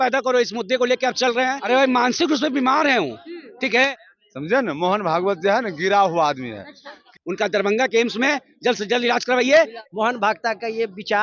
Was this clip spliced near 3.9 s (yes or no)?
yes